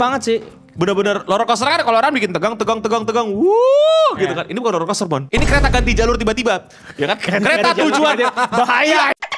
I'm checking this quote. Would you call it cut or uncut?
cut